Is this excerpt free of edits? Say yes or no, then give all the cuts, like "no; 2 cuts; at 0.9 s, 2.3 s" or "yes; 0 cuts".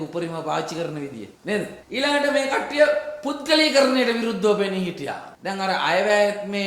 yes; 0 cuts